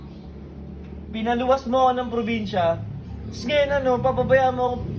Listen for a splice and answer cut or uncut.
uncut